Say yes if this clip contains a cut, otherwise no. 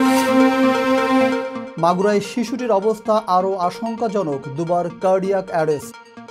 yes